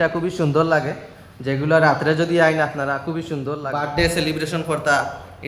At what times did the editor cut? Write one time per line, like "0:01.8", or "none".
0:03.6